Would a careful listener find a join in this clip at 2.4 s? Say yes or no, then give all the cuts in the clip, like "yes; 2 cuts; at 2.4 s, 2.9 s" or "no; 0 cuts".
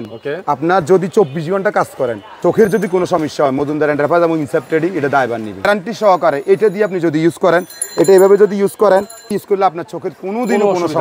yes; 3 cuts; at 2.4 s, 5.7 s, 9.4 s